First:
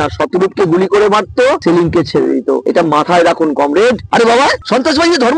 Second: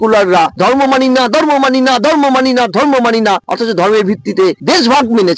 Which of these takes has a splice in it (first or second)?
first